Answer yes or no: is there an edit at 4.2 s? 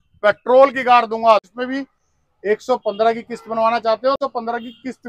yes